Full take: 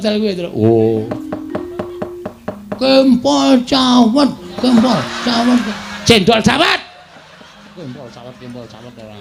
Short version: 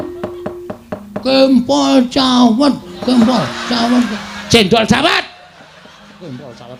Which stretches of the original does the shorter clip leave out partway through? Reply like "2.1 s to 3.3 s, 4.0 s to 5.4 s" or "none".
none

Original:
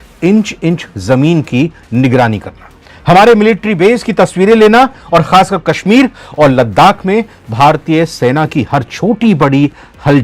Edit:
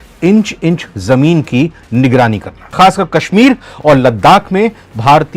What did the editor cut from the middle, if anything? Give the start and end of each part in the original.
2.7 s to 5.3 s

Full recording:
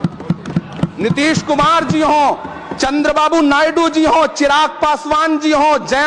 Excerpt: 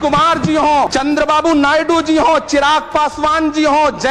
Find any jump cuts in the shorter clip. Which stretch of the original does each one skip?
2.4 s to 2.8 s

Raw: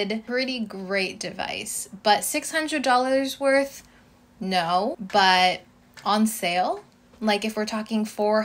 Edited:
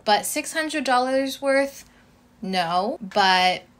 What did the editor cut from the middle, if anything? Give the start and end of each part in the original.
none

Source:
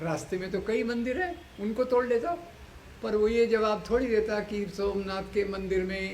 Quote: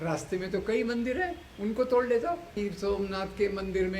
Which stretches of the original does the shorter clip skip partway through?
2.6 s to 4.6 s

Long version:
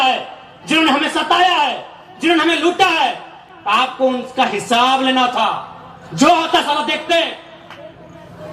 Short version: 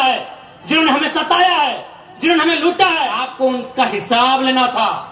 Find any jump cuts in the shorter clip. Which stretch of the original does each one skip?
3.2 s to 3.8 s

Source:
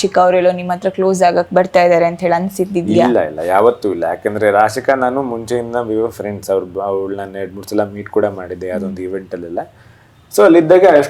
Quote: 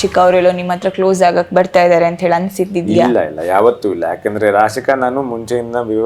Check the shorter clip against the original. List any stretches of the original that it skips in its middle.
none

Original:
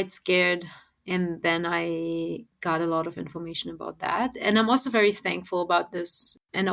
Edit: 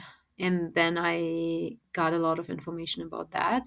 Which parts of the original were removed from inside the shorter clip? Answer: none

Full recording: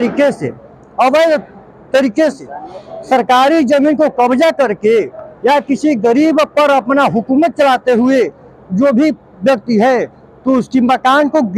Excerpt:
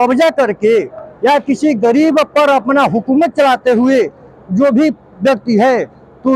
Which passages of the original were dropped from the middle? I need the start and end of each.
none

